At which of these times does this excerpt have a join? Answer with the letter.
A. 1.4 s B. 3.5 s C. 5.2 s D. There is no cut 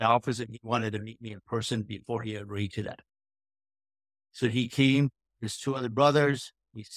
D